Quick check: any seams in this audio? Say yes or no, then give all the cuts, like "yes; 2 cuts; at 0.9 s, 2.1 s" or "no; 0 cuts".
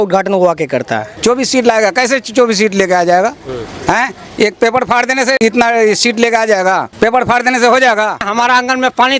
yes; 4 cuts; at 1.1 s, 5.4 s, 6.9 s, 8.3 s